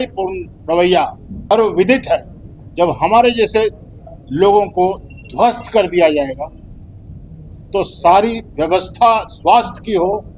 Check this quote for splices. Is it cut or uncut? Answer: cut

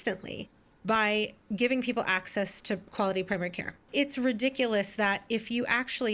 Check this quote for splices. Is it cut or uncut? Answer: cut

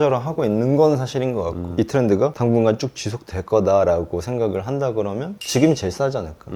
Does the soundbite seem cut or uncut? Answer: cut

